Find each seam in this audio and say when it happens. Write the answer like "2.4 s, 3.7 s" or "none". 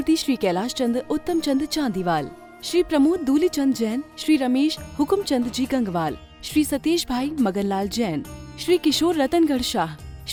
none